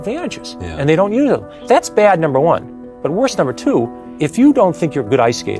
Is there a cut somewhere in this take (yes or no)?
yes